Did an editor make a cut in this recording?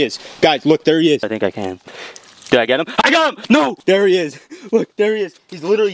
yes; 2 cuts; at 1.2 s, 3.8 s

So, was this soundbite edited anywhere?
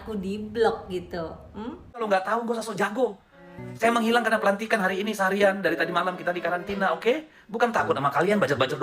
yes; 1 cut; at 1.9 s

